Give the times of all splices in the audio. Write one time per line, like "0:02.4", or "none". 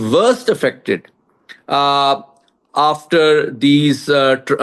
none